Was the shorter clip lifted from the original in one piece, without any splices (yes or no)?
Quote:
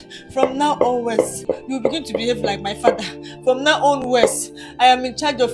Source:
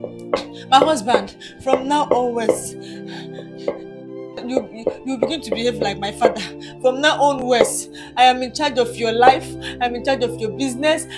no